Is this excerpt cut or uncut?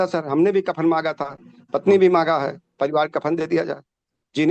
uncut